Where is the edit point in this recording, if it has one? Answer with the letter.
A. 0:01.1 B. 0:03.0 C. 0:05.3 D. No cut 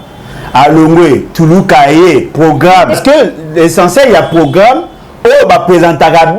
B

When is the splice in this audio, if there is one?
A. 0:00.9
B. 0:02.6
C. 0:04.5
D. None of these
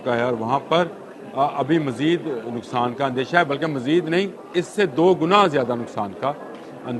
C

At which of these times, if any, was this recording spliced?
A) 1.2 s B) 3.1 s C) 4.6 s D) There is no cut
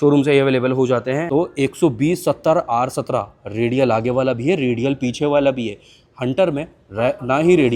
A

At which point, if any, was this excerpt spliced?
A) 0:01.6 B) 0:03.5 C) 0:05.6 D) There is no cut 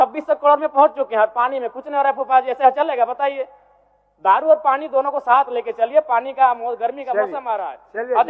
D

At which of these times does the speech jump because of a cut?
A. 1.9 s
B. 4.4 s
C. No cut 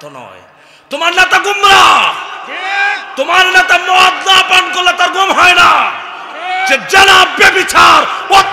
C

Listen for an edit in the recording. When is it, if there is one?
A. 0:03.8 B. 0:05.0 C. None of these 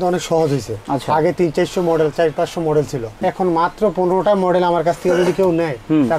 C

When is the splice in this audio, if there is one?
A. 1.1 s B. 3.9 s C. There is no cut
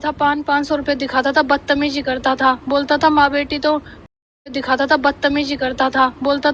C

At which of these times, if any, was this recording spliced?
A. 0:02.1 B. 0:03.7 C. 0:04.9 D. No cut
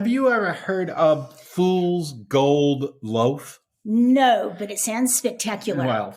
D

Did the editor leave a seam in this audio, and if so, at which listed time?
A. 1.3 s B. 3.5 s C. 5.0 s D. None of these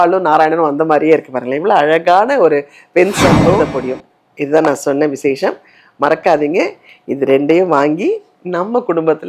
B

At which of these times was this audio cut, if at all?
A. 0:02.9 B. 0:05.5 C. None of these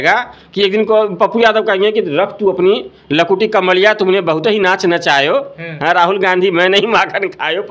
C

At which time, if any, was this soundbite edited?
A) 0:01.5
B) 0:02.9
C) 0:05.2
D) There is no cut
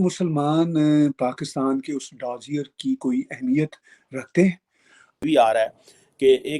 C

